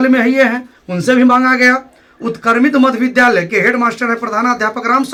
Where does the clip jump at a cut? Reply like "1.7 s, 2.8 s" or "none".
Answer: none